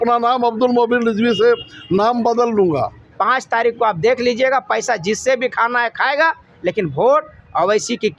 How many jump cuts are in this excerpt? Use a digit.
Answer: 1